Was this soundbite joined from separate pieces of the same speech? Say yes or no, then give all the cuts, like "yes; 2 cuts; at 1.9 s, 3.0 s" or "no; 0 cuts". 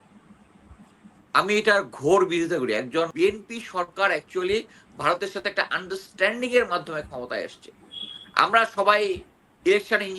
yes; 1 cut; at 3.1 s